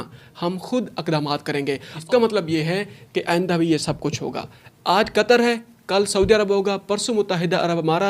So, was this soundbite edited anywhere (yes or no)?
yes